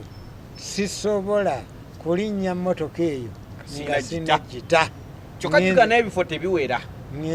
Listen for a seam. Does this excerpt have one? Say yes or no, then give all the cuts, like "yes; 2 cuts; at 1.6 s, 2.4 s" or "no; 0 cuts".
no; 0 cuts